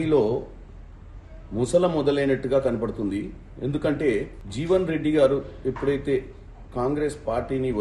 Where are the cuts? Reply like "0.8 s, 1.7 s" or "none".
4.4 s